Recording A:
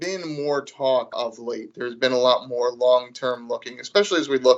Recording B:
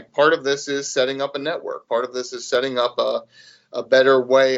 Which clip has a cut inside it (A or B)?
A